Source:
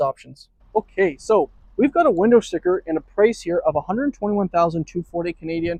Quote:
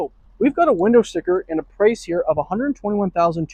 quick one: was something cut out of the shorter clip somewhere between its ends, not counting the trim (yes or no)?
no